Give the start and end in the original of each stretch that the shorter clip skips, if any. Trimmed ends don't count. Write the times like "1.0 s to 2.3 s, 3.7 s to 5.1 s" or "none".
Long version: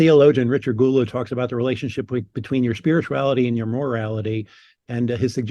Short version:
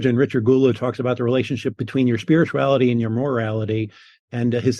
2.1 s to 2.3 s